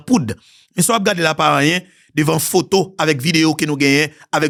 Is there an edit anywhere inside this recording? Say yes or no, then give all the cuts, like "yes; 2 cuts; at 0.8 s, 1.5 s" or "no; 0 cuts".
no; 0 cuts